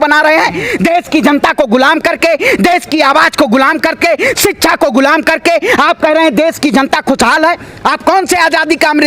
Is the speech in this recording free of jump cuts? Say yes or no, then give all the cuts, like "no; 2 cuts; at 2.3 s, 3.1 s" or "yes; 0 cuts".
yes; 0 cuts